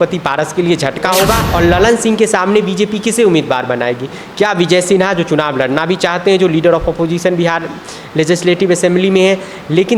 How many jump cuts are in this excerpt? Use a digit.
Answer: 1